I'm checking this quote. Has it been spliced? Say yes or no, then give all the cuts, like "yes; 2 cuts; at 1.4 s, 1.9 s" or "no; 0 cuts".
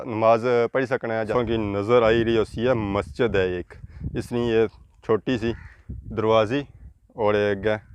yes; 1 cut; at 1.3 s